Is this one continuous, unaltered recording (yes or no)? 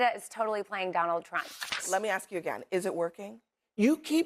no